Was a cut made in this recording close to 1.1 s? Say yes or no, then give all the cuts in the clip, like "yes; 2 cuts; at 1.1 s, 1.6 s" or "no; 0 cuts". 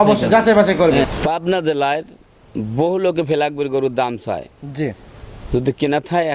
yes; 1 cut; at 1.1 s